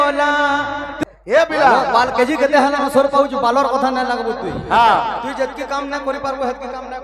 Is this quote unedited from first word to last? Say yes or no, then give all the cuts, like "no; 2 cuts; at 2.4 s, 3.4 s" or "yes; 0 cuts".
no; 1 cut; at 0.9 s